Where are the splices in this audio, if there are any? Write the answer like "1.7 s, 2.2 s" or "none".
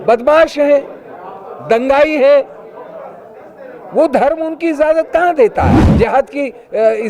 5.8 s

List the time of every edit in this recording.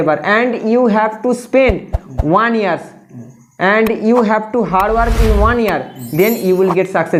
none

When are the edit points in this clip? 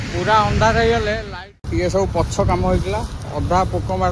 1.2 s

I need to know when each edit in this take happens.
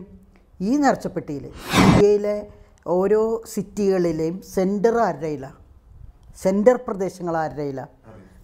1.6 s

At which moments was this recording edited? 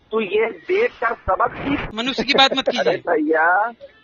1.9 s

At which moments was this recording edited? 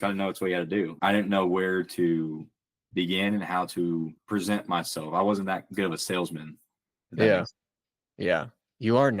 0.9 s, 4.2 s

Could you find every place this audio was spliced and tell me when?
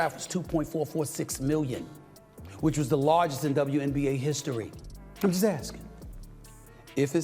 4.9 s

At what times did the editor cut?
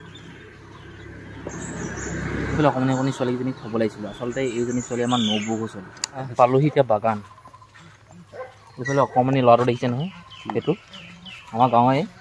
none

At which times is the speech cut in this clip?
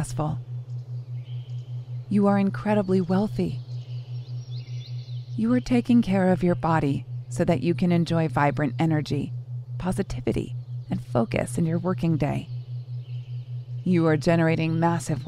none

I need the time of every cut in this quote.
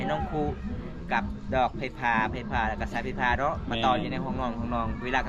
none

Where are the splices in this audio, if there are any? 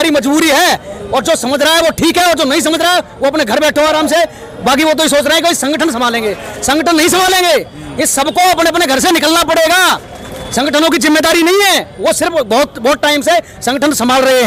none

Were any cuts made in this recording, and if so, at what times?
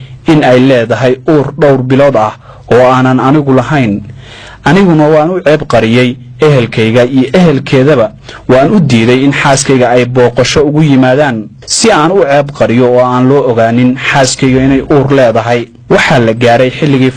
7.4 s

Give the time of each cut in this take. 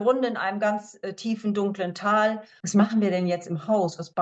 2.5 s

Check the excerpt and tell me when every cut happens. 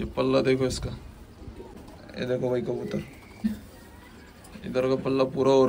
1.7 s, 3.5 s

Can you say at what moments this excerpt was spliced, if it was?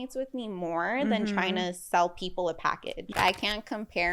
3.1 s

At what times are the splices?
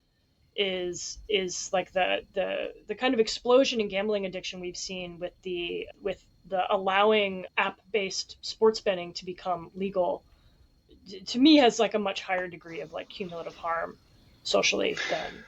5.9 s, 7.4 s

